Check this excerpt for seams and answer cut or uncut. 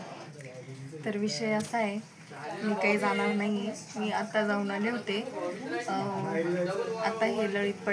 uncut